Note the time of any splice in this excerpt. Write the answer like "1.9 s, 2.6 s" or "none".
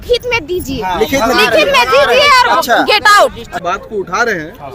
3.5 s